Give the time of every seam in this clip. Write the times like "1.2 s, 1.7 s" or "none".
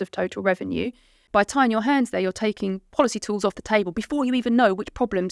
1.2 s